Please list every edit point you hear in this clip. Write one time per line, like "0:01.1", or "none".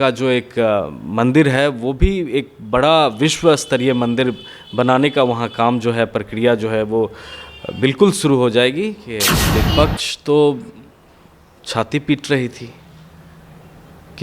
0:09.4

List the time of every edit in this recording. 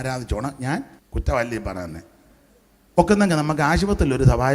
0:01.0

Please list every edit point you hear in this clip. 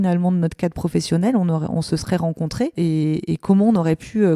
none

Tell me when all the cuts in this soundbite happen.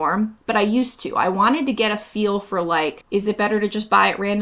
0:03.0

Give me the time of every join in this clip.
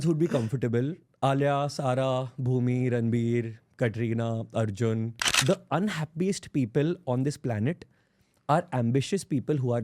0:05.2

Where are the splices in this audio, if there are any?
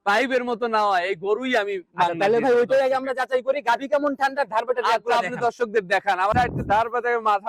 0:06.3

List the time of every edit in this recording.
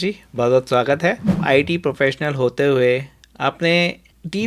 0:01.4

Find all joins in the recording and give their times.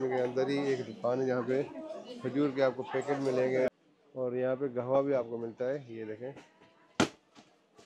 0:03.7

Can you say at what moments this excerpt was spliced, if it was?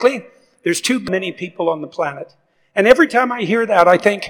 0:01.1

